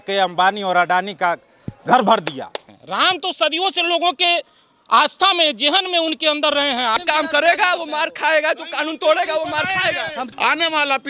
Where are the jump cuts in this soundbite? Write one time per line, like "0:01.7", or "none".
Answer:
0:02.7
0:07.0
0:10.3

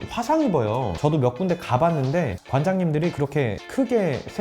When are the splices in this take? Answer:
0:00.9

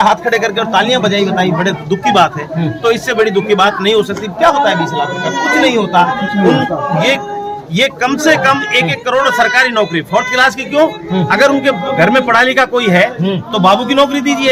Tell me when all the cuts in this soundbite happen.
none

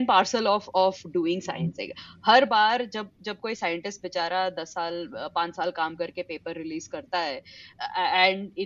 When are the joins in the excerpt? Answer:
none

